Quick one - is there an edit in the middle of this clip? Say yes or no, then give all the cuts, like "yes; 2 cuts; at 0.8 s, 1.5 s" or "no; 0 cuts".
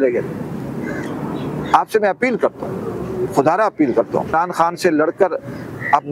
yes; 1 cut; at 4.3 s